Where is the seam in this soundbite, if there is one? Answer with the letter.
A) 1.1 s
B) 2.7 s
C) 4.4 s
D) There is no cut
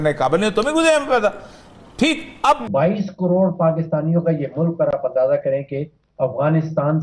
B